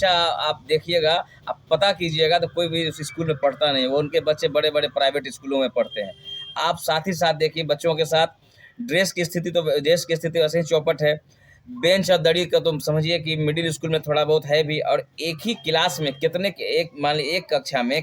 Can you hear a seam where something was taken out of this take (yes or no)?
no